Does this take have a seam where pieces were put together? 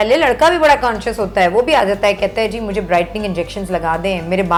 no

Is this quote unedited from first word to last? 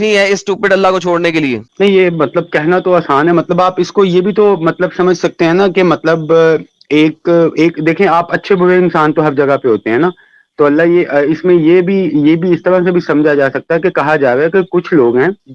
yes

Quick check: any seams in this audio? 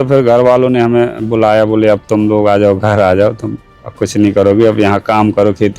no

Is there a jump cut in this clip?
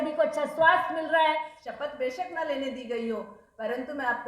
yes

